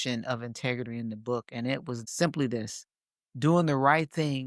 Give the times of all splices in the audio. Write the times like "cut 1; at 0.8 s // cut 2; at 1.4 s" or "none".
cut 1; at 2.0 s